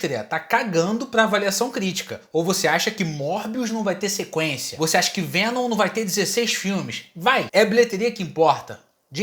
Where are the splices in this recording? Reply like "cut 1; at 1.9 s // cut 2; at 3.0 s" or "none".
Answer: none